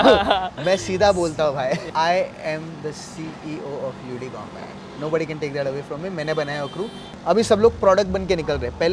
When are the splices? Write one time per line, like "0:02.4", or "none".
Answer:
0:01.9
0:07.0